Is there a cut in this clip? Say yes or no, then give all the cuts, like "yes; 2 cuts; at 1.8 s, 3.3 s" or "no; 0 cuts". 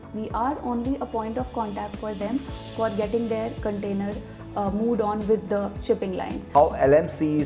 yes; 1 cut; at 6.4 s